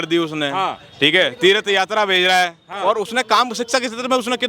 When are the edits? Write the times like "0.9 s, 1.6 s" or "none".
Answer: 2.7 s